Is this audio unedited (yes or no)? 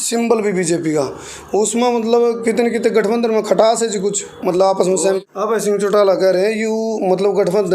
no